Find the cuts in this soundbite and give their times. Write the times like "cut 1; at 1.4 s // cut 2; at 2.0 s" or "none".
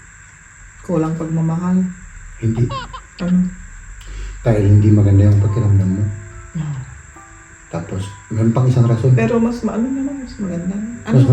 none